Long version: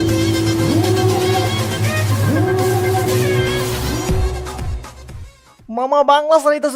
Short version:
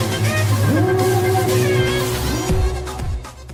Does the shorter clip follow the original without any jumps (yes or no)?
yes